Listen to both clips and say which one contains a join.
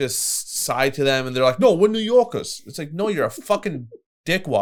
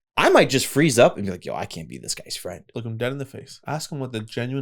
second; 2 cuts; at 2.6 s, 3.5 s

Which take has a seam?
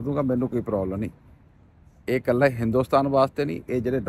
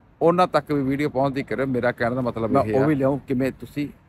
second; 1 cut; at 2.5 s

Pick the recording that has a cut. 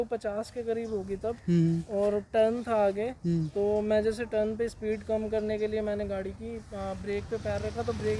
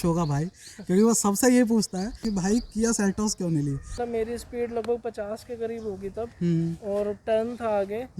second; 2 cuts; at 2.2 s, 3.9 s

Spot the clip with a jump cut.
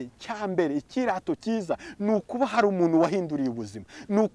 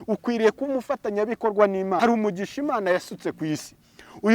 second; 1 cut; at 2.0 s

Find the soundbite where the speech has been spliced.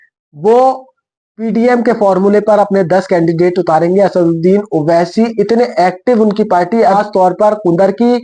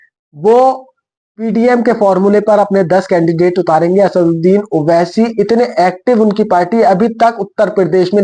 first; 1 cut; at 6.9 s

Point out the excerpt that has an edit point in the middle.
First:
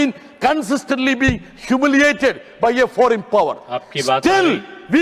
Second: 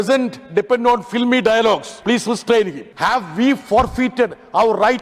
second; 2 cuts; at 1.9 s, 2.8 s

